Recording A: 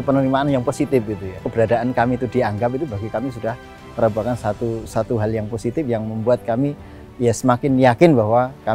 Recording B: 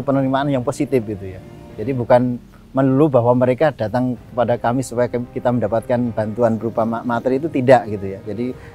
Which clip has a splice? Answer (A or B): A